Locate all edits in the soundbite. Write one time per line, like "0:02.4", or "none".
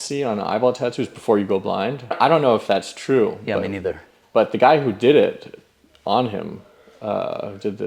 none